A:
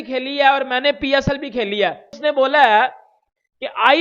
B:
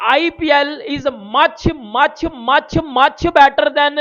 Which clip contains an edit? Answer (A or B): A